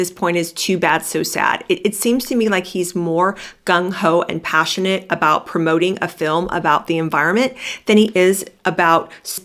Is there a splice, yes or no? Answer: no